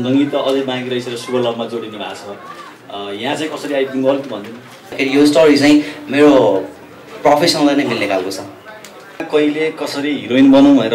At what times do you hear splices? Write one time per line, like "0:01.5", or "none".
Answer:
0:04.9
0:09.3